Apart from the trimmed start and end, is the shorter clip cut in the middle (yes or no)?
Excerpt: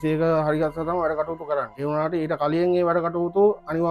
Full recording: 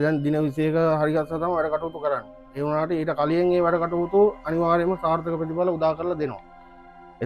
yes